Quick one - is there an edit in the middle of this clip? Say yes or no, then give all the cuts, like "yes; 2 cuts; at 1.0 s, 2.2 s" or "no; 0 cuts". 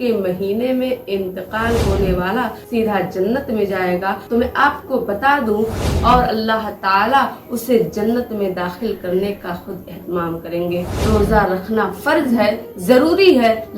yes; 2 cuts; at 5.8 s, 10.9 s